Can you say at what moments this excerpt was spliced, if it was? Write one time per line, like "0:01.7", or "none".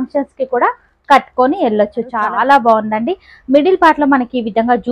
0:02.2